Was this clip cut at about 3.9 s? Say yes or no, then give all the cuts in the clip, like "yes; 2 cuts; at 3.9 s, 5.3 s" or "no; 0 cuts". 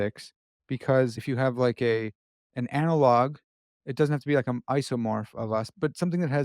no; 2 cuts; at 1.2 s, 5.7 s